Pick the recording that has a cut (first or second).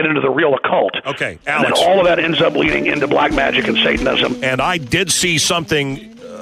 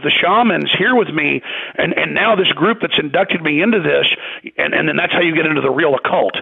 first